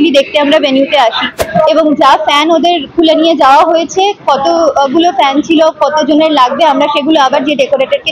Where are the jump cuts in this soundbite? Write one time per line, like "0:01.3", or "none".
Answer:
0:01.4